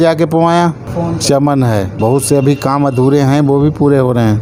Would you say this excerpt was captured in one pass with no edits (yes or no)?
yes